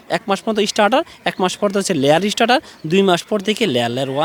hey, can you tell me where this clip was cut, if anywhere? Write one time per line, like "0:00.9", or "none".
none